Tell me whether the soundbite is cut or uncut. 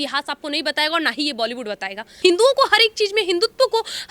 cut